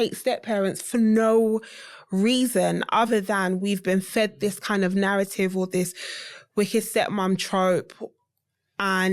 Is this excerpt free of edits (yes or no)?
yes